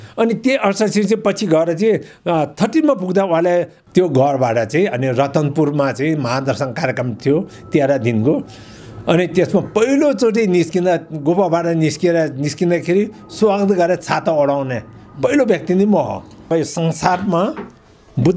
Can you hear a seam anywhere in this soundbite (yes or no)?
yes